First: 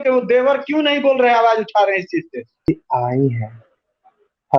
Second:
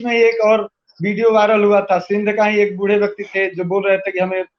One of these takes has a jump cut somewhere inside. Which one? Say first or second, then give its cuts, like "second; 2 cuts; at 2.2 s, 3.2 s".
first; 1 cut; at 2.7 s